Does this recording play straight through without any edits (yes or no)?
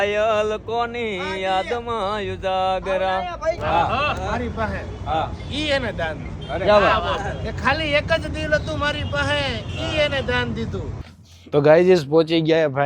no